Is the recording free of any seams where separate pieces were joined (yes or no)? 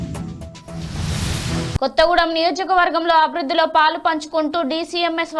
no